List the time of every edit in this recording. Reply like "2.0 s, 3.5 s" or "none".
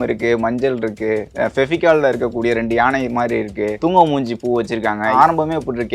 3.7 s, 5.1 s